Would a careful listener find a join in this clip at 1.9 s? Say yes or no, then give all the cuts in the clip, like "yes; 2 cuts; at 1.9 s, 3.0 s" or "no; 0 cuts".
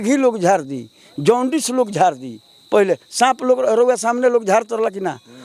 no; 0 cuts